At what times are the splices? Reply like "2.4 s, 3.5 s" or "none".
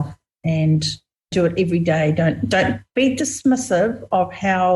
1.3 s